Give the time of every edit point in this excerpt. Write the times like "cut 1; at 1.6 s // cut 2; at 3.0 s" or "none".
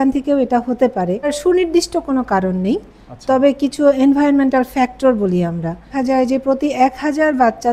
cut 1; at 1.4 s // cut 2; at 5.9 s